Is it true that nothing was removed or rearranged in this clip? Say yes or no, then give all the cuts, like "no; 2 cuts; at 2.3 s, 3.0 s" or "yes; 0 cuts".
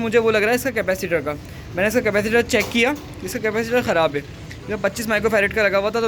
yes; 0 cuts